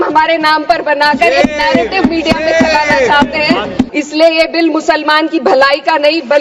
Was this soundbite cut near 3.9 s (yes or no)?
yes